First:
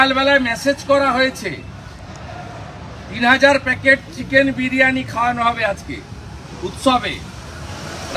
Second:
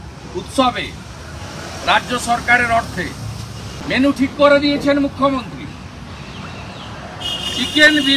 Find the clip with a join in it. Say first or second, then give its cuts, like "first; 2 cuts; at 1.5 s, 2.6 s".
second; 1 cut; at 3.7 s